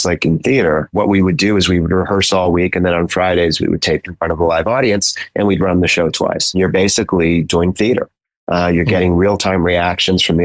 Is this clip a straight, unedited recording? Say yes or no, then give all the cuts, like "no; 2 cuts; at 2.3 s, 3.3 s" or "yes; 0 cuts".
yes; 0 cuts